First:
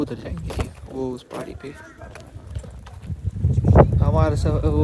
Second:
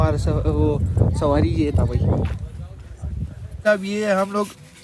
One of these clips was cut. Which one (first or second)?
second